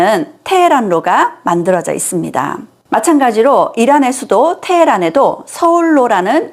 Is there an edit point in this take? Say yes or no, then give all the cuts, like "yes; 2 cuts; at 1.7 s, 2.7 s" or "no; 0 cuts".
yes; 1 cut; at 2.7 s